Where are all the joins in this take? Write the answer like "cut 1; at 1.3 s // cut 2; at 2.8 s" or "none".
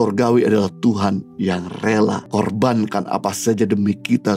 cut 1; at 2.2 s